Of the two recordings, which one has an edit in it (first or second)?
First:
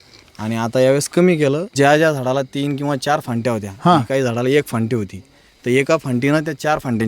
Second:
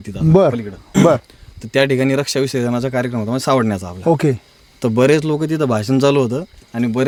first